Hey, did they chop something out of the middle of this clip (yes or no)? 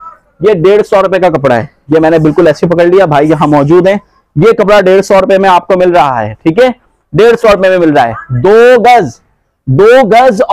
no